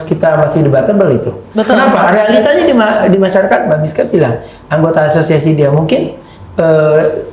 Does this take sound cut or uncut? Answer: uncut